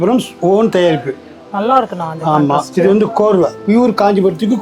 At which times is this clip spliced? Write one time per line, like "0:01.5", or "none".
none